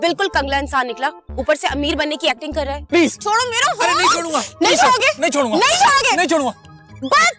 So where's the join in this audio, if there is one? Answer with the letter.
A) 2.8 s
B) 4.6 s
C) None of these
A